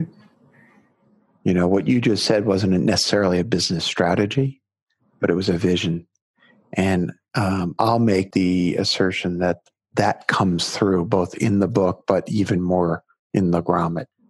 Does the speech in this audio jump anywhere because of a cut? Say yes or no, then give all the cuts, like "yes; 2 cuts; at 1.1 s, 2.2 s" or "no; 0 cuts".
yes; 1 cut; at 8.3 s